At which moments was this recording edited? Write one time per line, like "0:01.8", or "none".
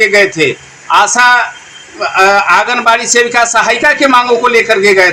none